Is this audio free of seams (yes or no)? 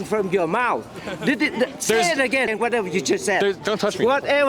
no